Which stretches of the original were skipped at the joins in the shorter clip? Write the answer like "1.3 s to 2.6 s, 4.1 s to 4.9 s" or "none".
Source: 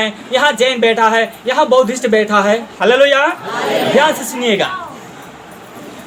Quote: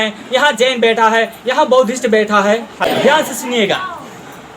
2.8 s to 3.7 s